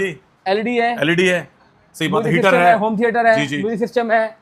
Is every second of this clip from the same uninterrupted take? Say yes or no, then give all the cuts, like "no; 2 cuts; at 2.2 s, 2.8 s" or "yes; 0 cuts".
yes; 0 cuts